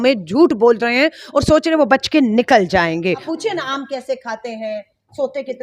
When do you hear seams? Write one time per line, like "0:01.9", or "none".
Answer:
0:03.3